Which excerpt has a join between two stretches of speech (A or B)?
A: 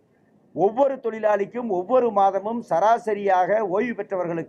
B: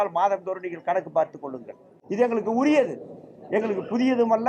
B